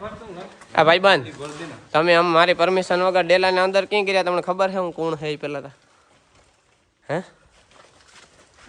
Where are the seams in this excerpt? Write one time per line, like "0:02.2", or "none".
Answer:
none

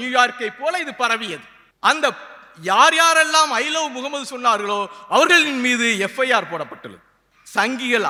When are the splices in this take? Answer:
none

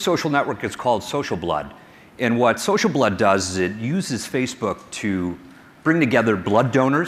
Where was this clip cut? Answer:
0:03.1

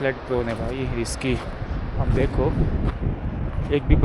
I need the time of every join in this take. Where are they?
none

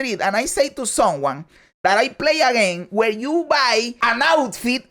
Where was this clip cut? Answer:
0:04.0

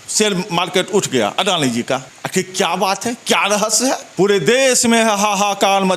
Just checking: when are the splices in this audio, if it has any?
0:02.2
0:04.1

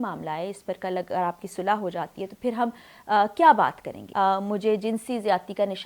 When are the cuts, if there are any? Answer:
0:04.0

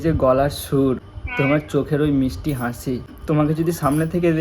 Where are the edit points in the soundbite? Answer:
0:01.2
0:03.1

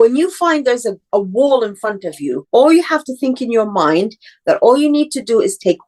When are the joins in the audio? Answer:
0:01.1
0:02.4

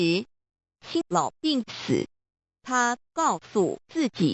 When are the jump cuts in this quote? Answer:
0:01.0

